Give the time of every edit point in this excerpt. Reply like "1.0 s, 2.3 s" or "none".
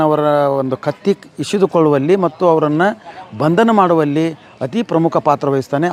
none